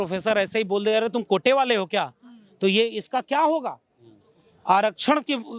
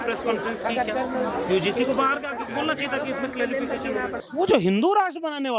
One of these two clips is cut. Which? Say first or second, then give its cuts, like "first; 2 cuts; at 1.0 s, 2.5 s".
second; 1 cut; at 4.2 s